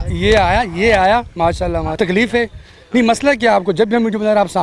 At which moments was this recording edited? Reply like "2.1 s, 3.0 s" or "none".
2.0 s